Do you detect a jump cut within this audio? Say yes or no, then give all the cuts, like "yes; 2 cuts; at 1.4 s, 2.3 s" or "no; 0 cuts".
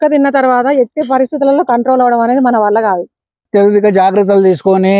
yes; 1 cut; at 3.4 s